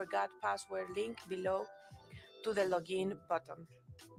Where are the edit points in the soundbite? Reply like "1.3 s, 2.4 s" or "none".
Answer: none